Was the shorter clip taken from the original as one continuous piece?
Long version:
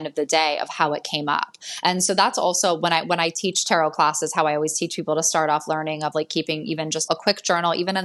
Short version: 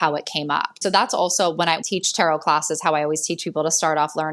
no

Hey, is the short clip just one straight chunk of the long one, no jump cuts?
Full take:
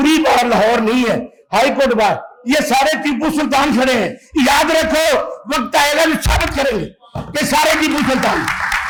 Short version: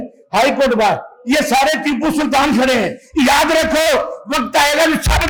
yes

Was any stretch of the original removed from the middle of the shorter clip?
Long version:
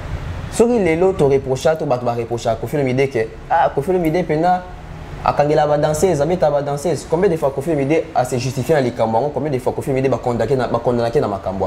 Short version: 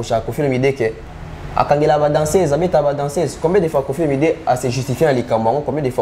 yes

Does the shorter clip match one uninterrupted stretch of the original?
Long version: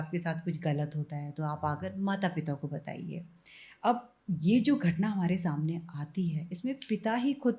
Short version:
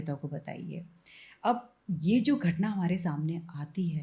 yes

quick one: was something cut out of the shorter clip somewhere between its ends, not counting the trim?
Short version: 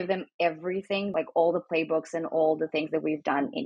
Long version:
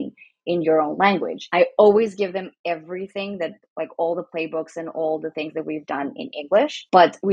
yes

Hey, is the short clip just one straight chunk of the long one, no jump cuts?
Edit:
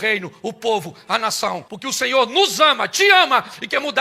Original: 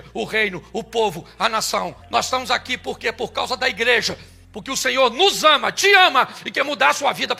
no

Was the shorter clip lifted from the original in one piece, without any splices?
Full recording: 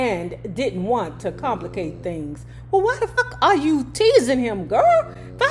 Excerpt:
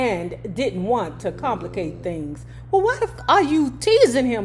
no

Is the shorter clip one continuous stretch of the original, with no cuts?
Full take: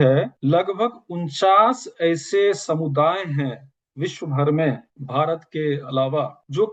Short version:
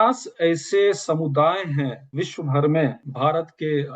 no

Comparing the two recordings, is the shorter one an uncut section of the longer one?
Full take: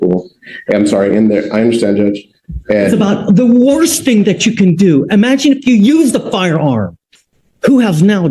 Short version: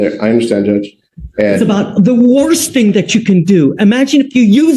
yes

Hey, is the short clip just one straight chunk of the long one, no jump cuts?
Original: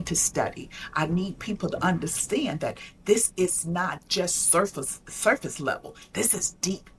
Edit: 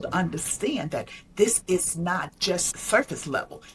no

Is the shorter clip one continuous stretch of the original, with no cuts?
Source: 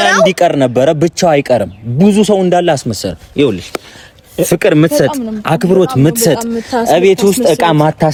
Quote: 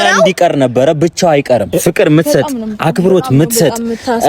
no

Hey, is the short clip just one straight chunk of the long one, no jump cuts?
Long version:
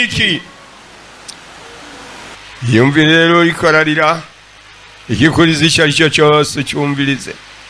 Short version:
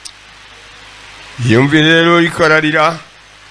yes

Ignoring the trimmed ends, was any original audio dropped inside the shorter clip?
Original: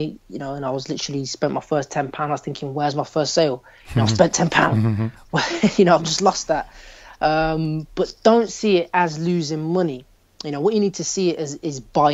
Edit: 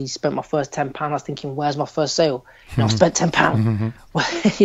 no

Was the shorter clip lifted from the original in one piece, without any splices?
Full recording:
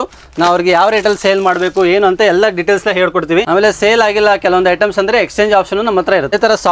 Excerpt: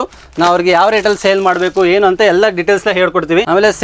yes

